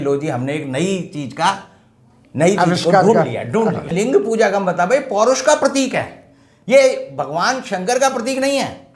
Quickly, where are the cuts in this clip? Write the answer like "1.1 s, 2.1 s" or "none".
3.9 s